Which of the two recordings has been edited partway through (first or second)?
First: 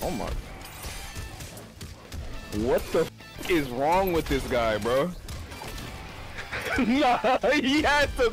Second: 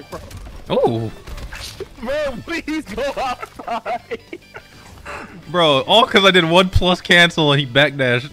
second